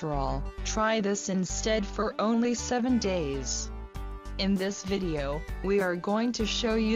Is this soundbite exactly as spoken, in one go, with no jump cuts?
yes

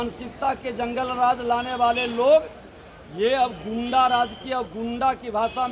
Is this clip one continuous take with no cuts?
yes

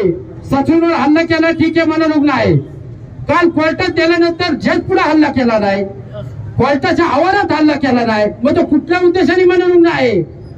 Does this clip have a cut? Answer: no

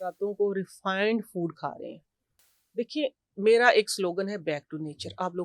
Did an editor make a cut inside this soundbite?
no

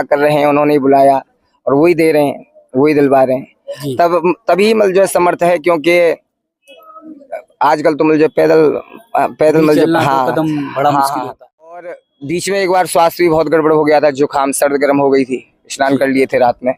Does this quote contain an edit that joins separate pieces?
yes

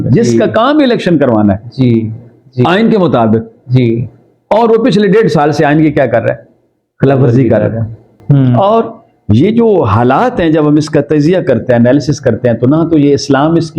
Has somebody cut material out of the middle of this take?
yes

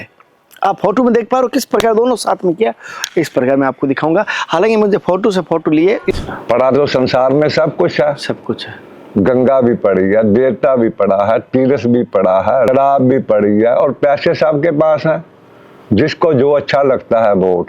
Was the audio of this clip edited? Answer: yes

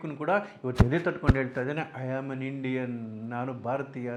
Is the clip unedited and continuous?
yes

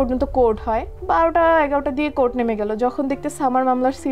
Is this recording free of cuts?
no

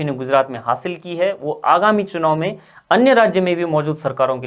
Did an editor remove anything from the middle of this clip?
no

